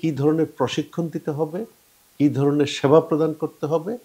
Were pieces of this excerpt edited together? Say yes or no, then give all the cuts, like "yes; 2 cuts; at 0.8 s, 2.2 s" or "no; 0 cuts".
no; 0 cuts